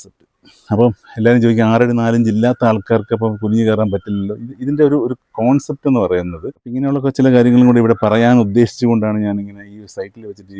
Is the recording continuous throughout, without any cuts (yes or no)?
no